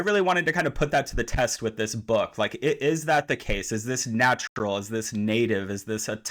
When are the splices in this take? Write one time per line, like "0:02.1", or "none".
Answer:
none